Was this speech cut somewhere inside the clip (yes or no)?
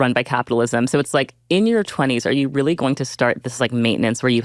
no